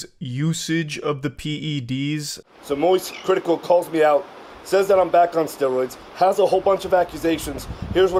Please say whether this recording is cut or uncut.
uncut